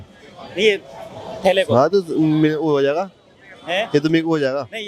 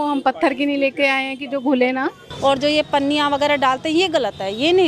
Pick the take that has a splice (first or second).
second